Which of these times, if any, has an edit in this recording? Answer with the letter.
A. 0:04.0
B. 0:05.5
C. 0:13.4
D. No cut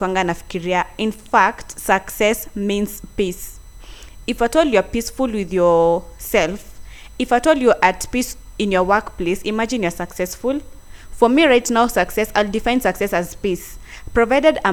D